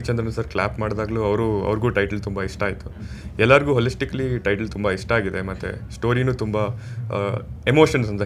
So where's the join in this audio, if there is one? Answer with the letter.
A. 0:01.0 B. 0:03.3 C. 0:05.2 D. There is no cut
D